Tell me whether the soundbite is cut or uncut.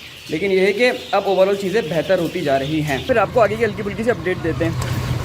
cut